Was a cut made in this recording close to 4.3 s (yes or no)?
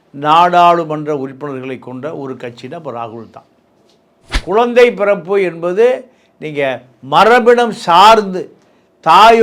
yes